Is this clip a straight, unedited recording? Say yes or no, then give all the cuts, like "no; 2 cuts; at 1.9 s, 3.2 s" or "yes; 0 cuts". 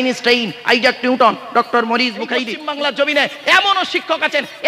no; 1 cut; at 2.5 s